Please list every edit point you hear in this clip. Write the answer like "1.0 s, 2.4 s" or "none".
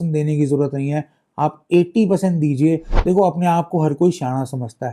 2.9 s